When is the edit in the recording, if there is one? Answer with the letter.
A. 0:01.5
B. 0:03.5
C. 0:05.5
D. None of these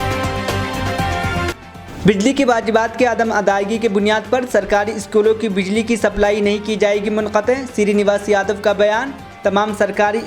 A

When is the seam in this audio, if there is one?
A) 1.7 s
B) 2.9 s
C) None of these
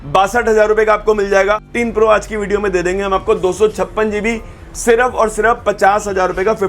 A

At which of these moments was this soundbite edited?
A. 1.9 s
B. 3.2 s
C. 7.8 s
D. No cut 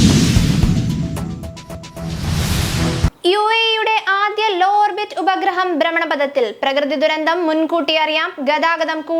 A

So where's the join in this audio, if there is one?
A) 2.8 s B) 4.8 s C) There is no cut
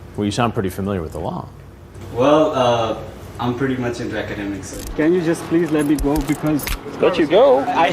B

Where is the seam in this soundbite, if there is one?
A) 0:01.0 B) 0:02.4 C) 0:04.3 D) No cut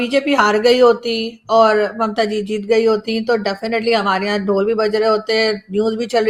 D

